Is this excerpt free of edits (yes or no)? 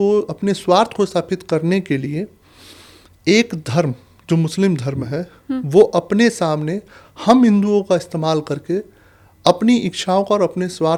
yes